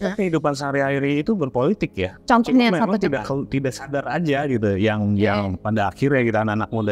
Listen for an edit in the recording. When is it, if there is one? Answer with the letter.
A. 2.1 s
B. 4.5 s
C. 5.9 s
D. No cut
A